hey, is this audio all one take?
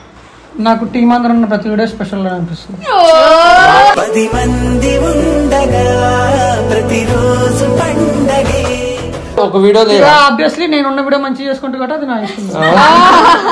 no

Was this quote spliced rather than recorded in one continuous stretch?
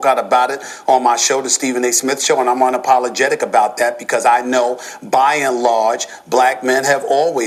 no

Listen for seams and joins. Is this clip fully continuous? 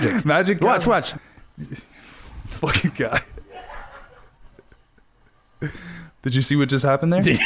no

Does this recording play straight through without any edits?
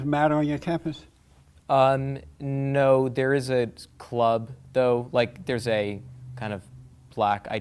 yes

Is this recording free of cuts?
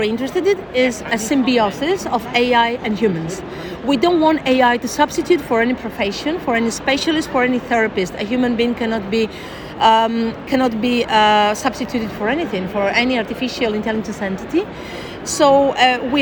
yes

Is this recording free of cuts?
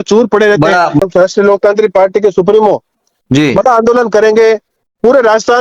no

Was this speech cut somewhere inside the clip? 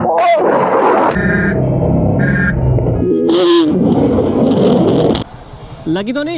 no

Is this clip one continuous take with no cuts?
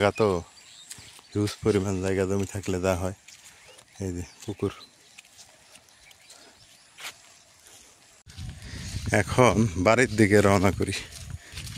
no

